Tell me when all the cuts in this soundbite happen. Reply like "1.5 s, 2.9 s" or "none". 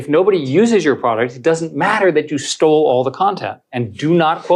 none